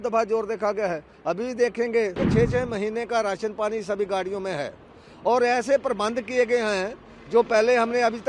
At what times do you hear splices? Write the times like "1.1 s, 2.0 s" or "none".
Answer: 2.2 s